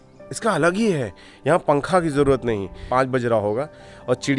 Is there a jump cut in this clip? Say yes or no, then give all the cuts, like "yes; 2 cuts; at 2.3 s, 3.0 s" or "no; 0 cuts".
yes; 1 cut; at 2.8 s